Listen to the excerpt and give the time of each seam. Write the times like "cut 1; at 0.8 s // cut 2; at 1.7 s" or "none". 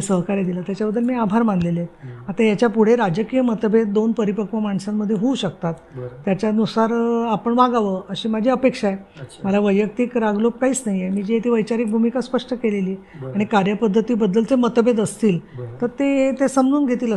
none